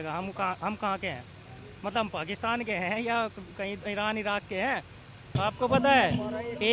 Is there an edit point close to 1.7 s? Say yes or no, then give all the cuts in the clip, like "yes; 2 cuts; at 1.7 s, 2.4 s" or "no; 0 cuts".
no; 1 cut; at 5.4 s